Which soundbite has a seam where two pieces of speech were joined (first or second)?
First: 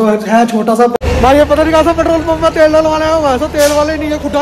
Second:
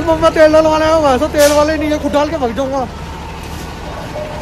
first